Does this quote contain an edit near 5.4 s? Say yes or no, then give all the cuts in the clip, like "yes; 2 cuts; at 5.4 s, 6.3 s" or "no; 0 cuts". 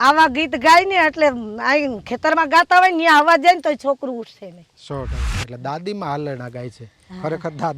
yes; 1 cut; at 5.4 s